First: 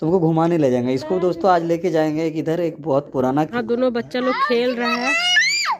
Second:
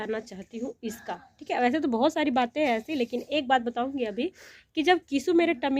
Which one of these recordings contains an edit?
first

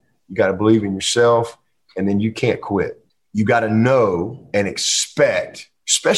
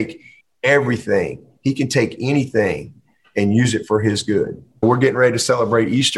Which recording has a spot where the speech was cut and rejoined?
second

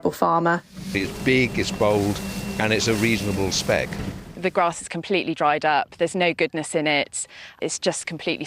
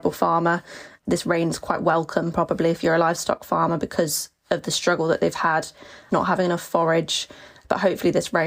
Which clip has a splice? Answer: first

